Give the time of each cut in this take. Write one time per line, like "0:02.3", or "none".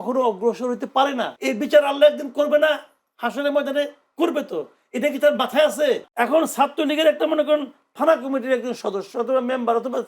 0:01.3
0:06.1